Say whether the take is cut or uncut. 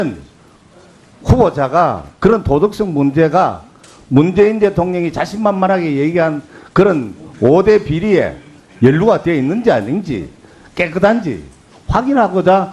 uncut